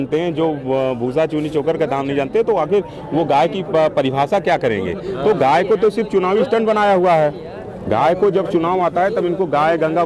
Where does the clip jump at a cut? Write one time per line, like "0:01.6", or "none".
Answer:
none